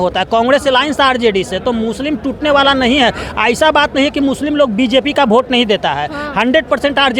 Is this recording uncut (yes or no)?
yes